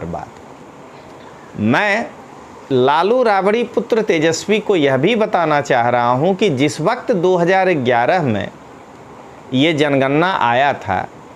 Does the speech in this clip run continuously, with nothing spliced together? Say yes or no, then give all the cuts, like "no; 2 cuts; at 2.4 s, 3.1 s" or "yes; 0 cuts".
yes; 0 cuts